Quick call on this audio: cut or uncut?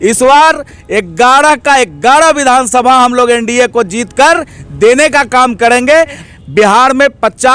cut